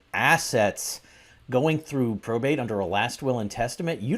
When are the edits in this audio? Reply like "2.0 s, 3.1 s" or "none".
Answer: 2.2 s

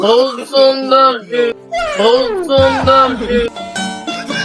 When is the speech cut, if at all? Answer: none

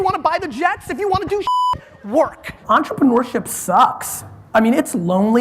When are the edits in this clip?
2.6 s

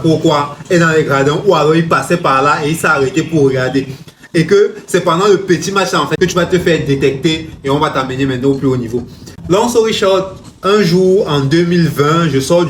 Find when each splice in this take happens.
none

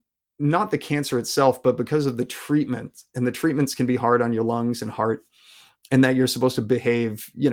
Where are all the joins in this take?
none

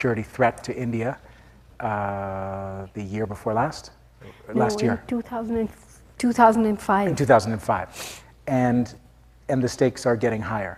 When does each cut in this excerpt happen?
none

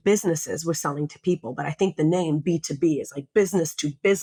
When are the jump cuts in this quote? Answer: none

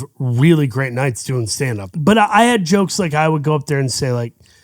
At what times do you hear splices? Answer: 1.8 s

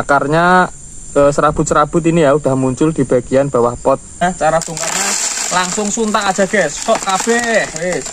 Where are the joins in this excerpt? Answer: 4.2 s

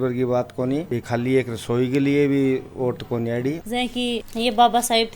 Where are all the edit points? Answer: 3.7 s

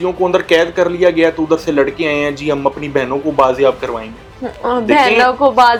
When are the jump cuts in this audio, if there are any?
none

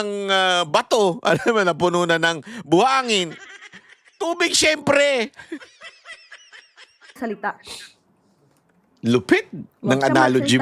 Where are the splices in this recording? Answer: 7.1 s

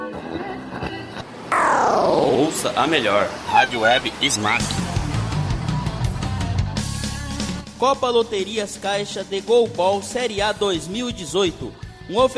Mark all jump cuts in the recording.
4.6 s

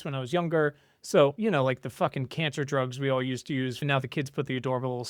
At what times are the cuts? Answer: 1.4 s, 3.8 s

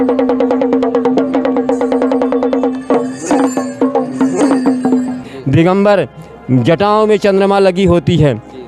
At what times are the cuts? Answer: 5.2 s

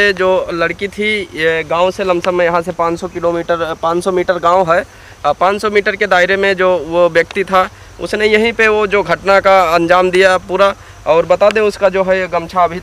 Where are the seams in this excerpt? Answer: none

